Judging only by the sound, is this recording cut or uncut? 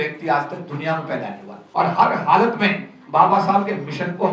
cut